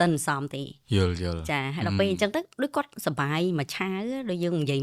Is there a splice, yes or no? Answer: no